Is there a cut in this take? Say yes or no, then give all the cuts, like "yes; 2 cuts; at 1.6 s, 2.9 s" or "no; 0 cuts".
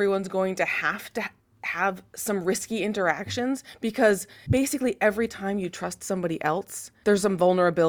yes; 2 cuts; at 4.3 s, 6.8 s